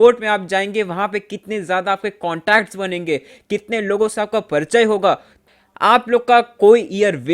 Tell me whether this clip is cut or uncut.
cut